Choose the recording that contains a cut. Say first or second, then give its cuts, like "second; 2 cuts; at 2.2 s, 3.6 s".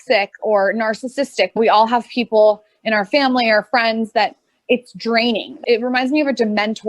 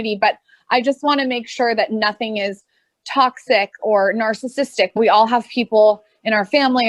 first; 1 cut; at 5.6 s